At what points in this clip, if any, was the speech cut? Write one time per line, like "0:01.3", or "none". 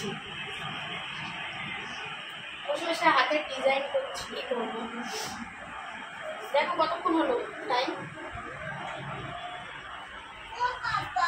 none

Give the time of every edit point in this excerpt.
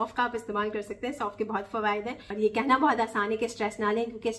0:02.2

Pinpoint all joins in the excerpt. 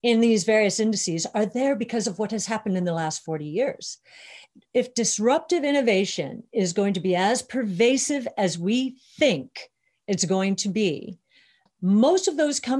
0:04.5
0:11.6

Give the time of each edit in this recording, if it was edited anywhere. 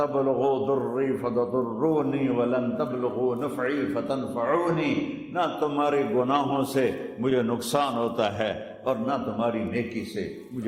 none

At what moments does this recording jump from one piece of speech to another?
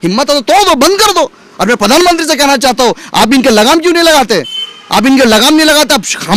none

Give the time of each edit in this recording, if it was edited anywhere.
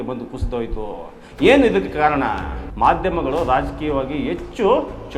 0:02.7

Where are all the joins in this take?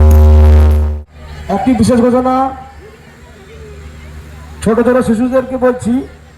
0:00.9

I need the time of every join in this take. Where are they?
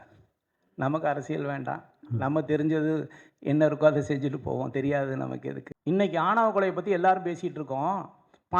0:05.7

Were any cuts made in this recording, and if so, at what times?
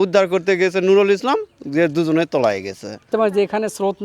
0:03.1

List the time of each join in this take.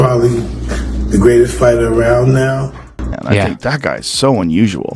0:03.0

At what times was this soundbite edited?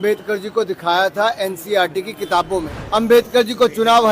0:02.8

